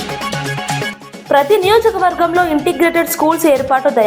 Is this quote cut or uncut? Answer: uncut